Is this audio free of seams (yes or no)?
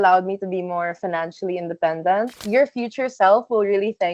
no